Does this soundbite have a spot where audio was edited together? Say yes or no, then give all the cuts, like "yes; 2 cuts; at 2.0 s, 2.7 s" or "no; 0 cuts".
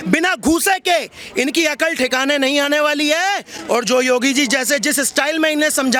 no; 0 cuts